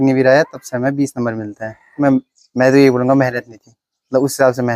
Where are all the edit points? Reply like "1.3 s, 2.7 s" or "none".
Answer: 1.9 s